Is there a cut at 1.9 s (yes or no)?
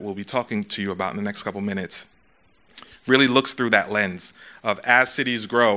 no